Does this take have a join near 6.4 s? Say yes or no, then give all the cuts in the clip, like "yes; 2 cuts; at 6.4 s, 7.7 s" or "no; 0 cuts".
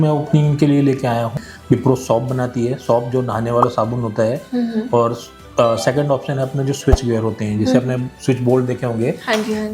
no; 1 cut; at 1.3 s